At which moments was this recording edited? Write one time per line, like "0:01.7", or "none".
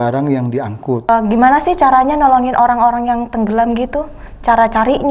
0:01.1